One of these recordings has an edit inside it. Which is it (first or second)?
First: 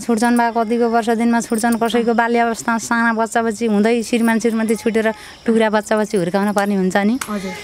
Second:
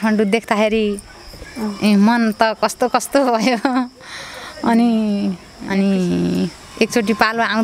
second